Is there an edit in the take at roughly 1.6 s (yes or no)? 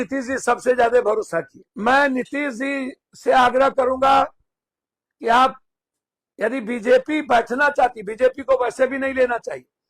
yes